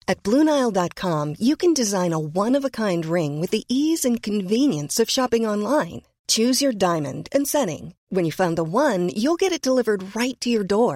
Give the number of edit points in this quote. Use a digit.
0